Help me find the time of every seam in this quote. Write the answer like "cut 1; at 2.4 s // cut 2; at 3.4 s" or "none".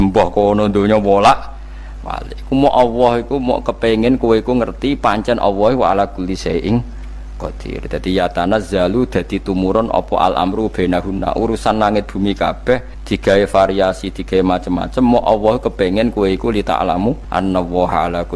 cut 1; at 12.9 s // cut 2; at 17.2 s